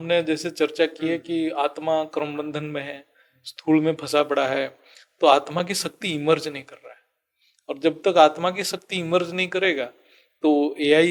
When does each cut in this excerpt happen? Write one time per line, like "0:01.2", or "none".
none